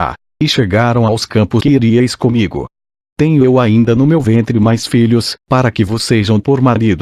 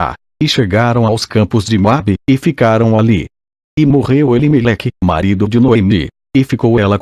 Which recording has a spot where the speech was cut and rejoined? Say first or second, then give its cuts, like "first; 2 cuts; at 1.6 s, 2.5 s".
second; 1 cut; at 1.6 s